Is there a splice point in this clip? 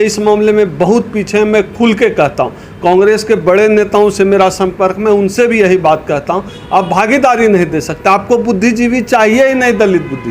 no; 0 cuts

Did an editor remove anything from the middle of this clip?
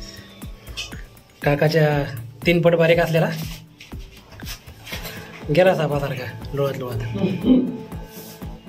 no; 0 cuts

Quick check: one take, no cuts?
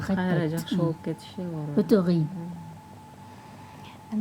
yes; 0 cuts

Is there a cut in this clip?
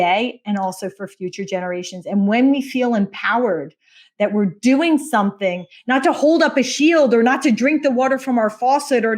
no; 0 cuts

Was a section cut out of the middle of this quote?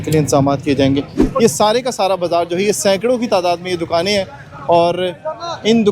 yes; 1 cut; at 1.2 s

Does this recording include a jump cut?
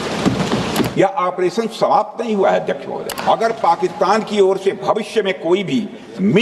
yes; 2 cuts; at 0.9 s, 3.2 s

